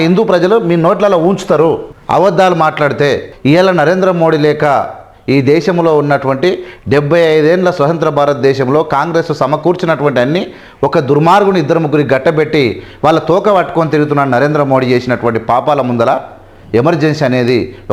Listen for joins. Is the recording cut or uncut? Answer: cut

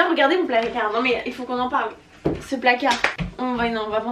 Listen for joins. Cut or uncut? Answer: uncut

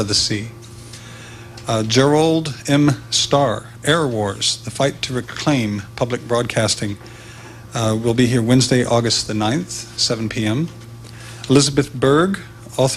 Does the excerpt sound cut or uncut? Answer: uncut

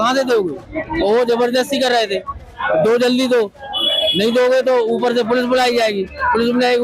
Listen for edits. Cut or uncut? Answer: uncut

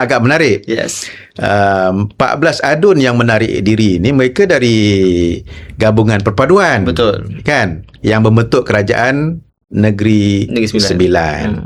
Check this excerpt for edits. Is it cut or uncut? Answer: uncut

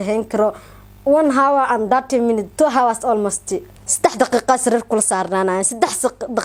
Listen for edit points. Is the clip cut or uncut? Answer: uncut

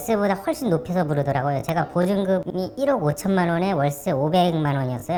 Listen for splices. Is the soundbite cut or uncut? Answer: uncut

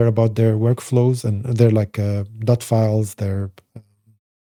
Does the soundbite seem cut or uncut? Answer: uncut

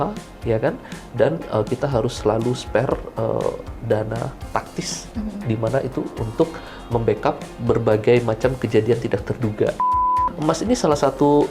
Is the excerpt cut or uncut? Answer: cut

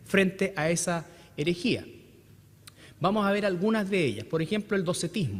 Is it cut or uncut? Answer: uncut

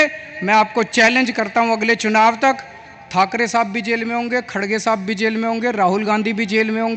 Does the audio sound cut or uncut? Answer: uncut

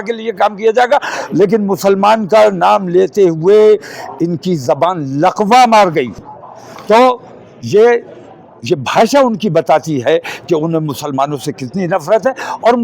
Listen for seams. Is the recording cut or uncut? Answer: uncut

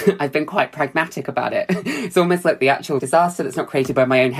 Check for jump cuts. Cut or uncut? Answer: cut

